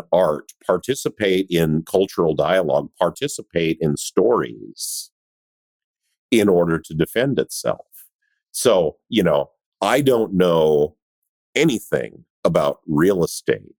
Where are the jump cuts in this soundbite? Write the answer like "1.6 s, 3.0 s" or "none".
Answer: none